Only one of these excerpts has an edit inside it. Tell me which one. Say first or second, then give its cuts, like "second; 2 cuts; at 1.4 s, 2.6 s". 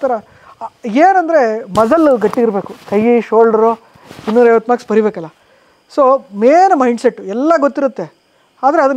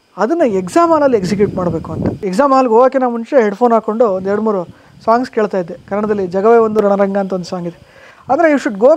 second; 2 cuts; at 2.2 s, 5.8 s